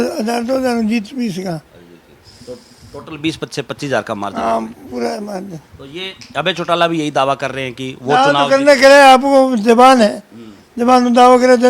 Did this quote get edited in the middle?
no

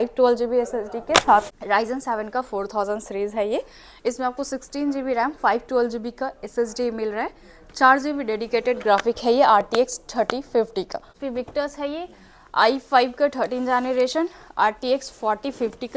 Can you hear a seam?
yes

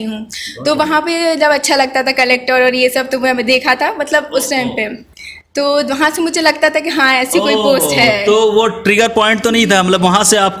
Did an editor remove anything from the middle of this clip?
no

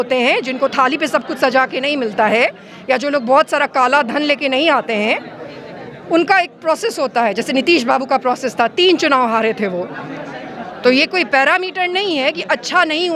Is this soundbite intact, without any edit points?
yes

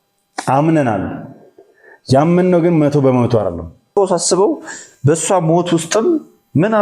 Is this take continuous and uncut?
no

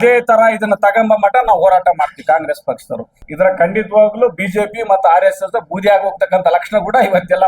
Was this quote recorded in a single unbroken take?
no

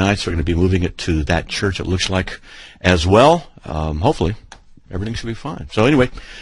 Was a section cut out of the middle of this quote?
yes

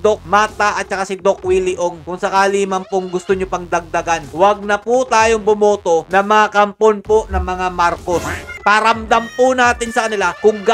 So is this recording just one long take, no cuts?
yes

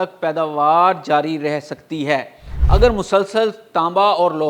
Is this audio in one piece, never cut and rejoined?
no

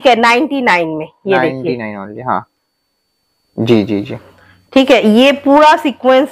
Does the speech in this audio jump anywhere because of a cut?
no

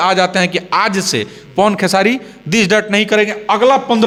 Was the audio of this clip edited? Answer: no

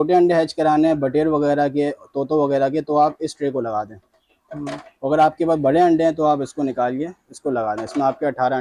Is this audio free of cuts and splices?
yes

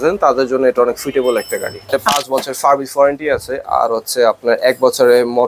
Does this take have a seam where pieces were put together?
yes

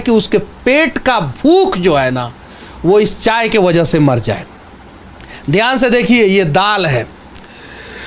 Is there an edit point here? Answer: no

